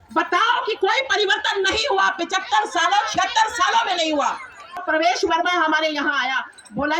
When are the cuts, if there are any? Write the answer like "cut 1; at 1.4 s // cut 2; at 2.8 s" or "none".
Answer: cut 1; at 4.8 s